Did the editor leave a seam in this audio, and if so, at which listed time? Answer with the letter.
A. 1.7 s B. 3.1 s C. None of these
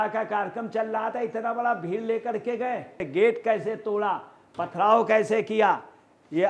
B